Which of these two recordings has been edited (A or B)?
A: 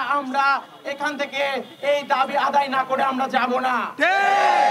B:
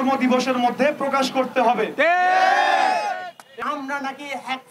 B